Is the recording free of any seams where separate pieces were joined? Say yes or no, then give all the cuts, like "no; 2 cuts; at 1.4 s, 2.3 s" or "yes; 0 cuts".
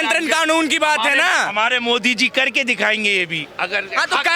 yes; 0 cuts